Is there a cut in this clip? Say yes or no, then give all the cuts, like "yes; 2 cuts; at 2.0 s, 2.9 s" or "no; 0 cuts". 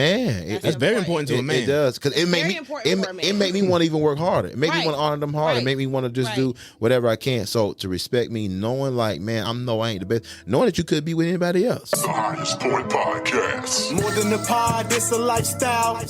yes; 1 cut; at 11.8 s